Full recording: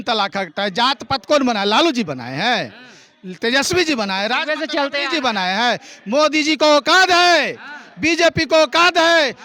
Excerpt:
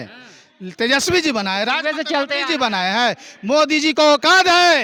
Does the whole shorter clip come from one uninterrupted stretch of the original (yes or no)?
yes